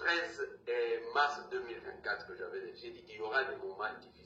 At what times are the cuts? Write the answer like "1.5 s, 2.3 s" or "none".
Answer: none

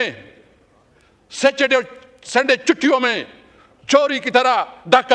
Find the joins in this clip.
none

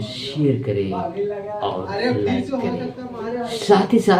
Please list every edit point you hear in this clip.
none

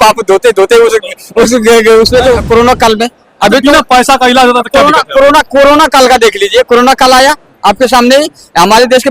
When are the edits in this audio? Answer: 2.4 s

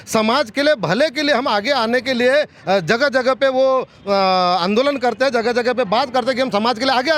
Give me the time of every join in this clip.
none

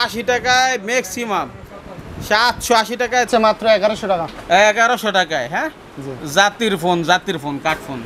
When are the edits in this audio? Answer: 3.3 s

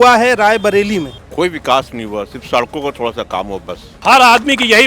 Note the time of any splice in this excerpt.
3.9 s

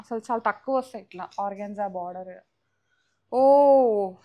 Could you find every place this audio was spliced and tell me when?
none

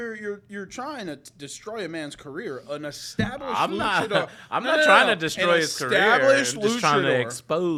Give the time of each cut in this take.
none

